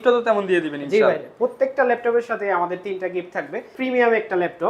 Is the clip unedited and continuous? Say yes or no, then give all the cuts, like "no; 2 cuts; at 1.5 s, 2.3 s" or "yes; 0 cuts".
no; 1 cut; at 3.7 s